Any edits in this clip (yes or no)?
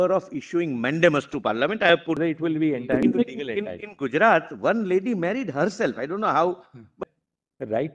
yes